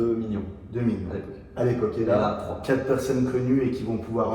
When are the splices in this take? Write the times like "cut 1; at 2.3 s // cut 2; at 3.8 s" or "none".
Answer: cut 1; at 2.6 s